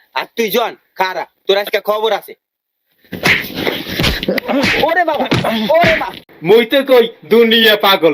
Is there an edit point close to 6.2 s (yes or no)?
yes